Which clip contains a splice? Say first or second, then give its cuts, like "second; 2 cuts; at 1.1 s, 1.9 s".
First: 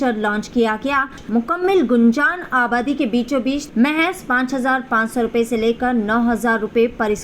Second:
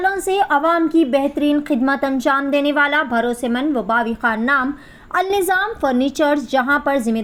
first; 2 cuts; at 1.2 s, 3.6 s